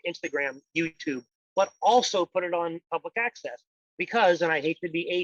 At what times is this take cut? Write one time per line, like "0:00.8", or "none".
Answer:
none